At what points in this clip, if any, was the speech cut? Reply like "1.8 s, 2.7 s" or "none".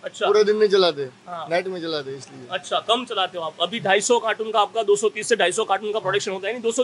none